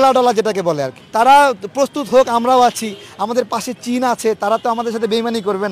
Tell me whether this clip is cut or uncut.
cut